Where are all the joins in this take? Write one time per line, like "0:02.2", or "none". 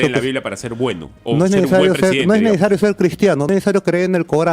0:01.1
0:03.5